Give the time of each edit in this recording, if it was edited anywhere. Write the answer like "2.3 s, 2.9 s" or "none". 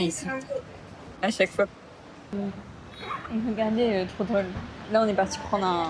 2.3 s